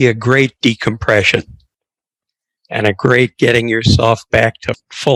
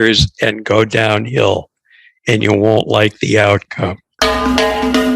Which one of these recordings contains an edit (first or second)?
second